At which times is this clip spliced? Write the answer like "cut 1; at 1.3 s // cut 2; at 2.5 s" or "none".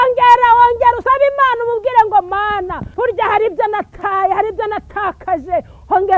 cut 1; at 1.0 s // cut 2; at 2.8 s

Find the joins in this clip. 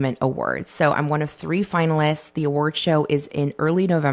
none

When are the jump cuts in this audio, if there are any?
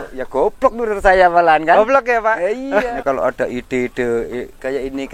cut 1; at 2.9 s

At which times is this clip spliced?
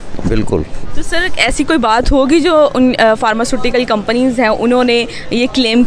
none

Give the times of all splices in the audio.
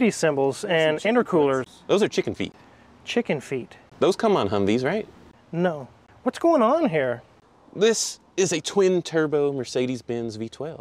none

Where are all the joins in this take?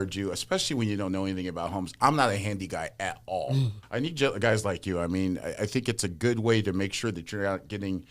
cut 1; at 3.8 s

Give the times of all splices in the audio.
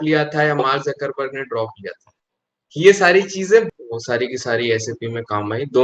cut 1; at 3.7 s

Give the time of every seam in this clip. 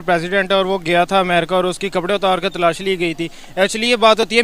none

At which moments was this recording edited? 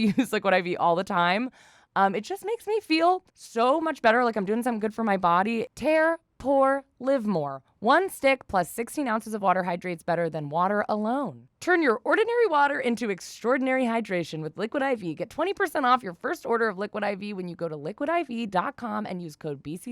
cut 1; at 3.4 s // cut 2; at 5.7 s

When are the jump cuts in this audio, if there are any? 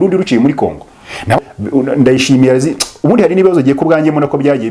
cut 1; at 1.4 s

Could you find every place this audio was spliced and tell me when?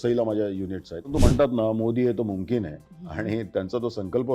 cut 1; at 1.1 s

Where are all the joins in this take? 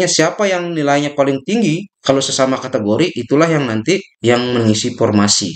cut 1; at 4.1 s

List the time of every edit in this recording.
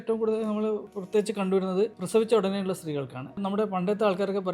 cut 1; at 0.9 s // cut 2; at 2.0 s // cut 3; at 3.4 s

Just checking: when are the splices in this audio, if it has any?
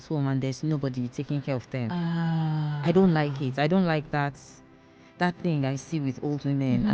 none

